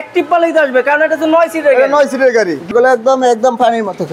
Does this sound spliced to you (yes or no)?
yes